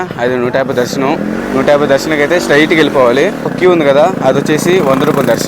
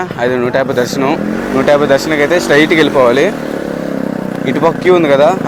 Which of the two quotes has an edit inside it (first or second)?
first